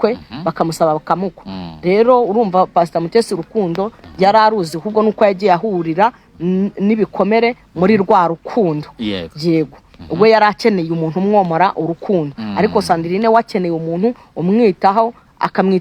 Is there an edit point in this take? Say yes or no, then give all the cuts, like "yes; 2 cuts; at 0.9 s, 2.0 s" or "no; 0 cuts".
no; 0 cuts